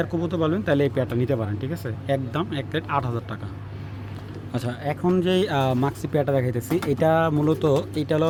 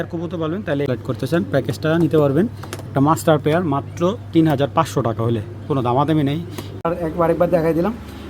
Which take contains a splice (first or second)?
second